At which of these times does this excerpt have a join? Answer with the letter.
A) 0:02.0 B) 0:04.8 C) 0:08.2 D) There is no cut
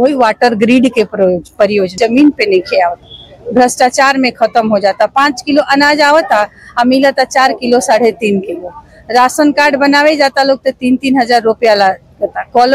A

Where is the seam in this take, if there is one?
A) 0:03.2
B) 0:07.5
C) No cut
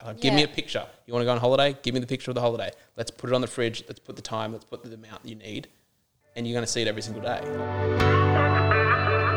B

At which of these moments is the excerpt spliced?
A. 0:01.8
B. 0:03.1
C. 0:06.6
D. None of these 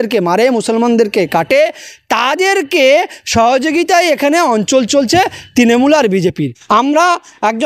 C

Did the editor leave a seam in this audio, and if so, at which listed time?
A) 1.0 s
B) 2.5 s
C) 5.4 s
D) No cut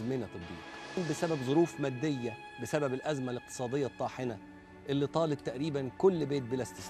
A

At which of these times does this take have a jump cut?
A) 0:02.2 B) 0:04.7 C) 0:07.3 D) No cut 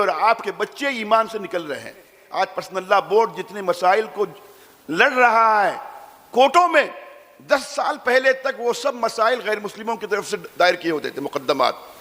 A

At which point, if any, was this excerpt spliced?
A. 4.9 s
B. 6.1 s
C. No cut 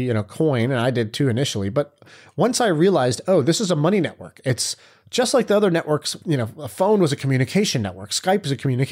B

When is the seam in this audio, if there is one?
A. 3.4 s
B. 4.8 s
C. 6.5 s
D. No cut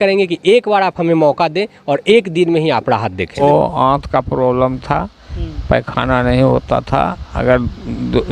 A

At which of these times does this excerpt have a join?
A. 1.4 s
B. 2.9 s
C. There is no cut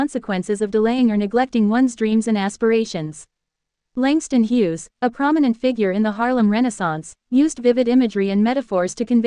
C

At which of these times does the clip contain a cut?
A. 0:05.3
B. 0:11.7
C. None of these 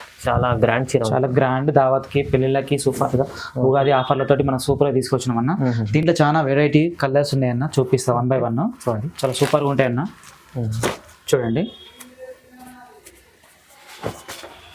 C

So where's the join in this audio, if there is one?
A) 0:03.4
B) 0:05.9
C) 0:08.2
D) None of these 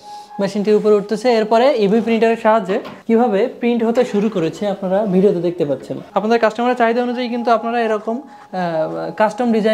B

